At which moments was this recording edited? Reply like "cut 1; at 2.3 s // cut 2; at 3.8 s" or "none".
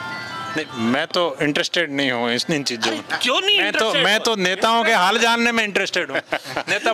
none